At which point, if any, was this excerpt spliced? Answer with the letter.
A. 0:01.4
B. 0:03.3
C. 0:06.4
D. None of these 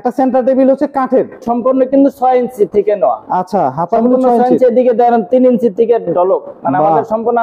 A